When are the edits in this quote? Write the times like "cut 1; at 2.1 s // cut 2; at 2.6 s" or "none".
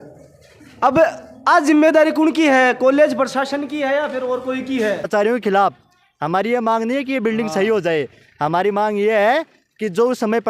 cut 1; at 5.1 s